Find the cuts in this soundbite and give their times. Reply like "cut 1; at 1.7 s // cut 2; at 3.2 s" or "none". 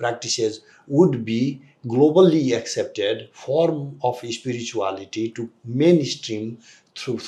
none